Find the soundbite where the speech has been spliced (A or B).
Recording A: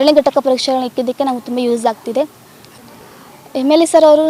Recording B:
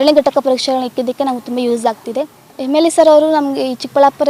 B